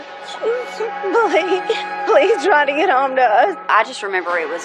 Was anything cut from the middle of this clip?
yes; 1 cut; at 3.7 s

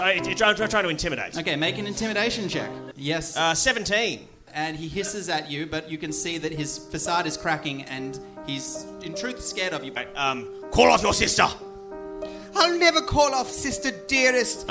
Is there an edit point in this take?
yes; 3 cuts; at 2.9 s, 4.5 s, 9.9 s

